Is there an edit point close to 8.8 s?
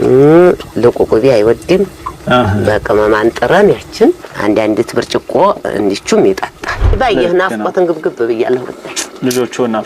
no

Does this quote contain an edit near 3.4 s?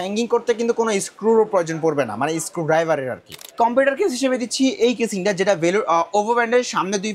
yes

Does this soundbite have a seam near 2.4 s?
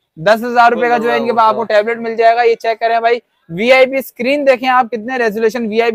no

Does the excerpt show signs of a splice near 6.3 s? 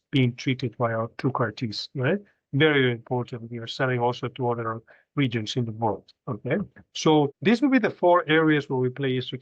no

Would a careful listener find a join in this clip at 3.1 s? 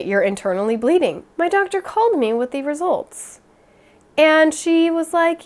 no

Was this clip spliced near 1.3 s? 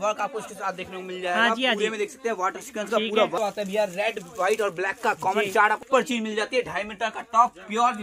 no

